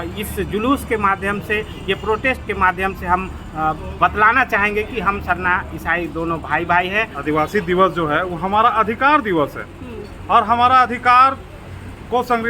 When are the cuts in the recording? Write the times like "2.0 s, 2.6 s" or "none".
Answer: 7.1 s